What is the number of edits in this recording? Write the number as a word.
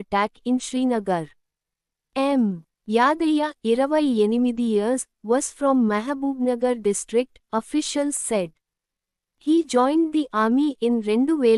two